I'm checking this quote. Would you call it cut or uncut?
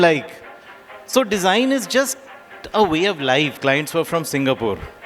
cut